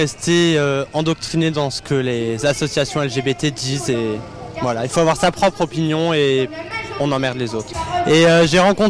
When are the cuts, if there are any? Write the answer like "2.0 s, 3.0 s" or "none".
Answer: 7.8 s